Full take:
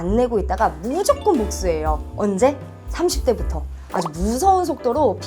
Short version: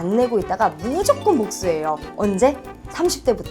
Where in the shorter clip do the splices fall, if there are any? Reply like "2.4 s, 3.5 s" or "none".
none